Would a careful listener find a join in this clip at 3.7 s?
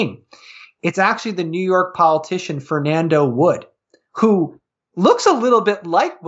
no; 0 cuts

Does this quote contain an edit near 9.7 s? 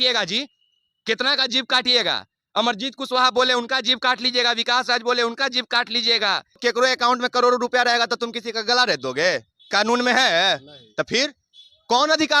no; 1 cut; at 6.6 s

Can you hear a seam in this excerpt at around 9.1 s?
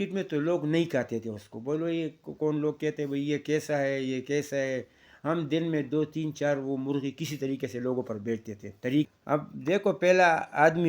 yes; 1 cut; at 9.1 s

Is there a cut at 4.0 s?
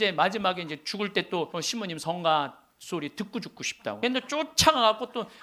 yes; 2 cuts; at 1.5 s, 4.0 s

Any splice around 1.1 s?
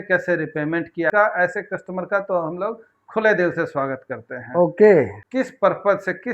yes; 2 cuts; at 1.1 s, 5.2 s

